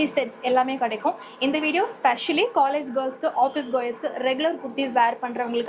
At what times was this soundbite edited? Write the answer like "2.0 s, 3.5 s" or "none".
none